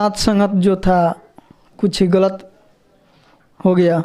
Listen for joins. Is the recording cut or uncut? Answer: uncut